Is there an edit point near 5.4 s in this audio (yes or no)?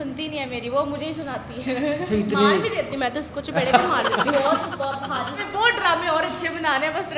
yes